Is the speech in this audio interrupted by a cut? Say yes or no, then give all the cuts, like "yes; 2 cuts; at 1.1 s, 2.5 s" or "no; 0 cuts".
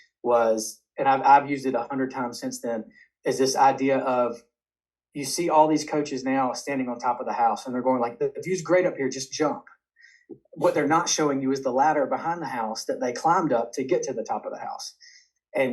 no; 0 cuts